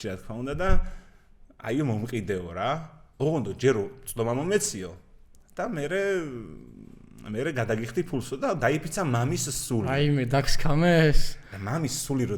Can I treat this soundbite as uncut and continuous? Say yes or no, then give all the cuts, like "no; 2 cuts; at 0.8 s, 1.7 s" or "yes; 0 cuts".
yes; 0 cuts